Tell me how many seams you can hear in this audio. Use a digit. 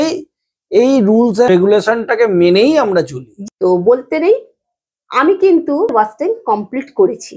3